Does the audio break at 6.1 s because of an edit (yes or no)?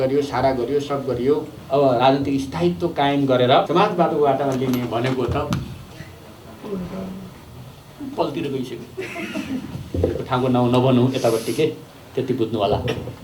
no